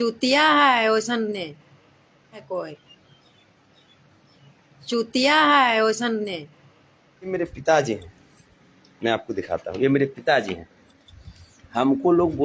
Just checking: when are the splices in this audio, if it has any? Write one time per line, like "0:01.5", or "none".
0:02.5
0:07.3